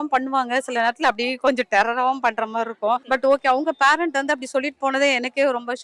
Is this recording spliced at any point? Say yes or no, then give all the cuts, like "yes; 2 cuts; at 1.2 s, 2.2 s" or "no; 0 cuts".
yes; 1 cut; at 3.0 s